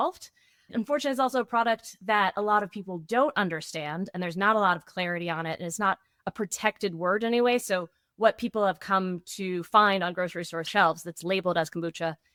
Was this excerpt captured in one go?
yes; 0 cuts

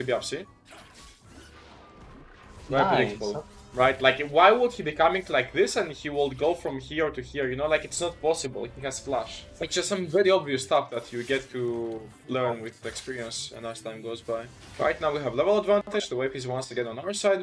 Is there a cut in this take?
no; 0 cuts

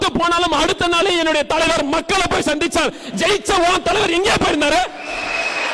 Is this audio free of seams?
yes; 0 cuts

